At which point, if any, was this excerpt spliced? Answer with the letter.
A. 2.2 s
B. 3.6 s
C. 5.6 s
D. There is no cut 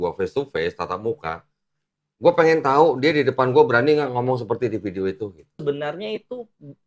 C